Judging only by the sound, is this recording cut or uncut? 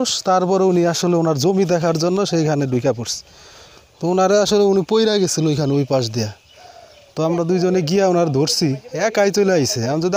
uncut